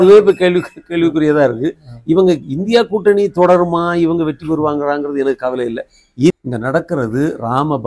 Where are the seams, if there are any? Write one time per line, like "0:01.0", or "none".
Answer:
0:06.3